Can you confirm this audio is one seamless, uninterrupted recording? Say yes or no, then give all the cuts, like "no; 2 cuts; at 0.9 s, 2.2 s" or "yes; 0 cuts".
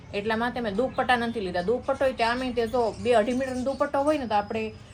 yes; 0 cuts